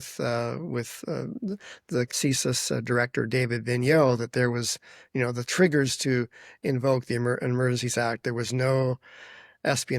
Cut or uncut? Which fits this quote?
cut